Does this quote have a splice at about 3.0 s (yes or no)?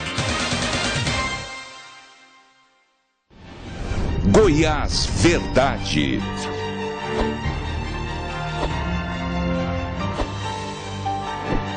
yes